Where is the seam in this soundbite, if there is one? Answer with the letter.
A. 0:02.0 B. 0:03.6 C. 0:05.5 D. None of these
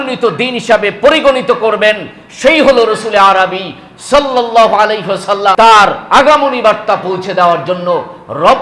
C